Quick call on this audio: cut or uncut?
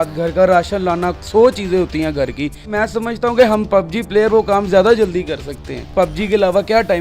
cut